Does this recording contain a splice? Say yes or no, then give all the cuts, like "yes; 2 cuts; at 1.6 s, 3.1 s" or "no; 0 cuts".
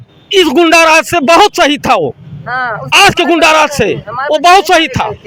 no; 0 cuts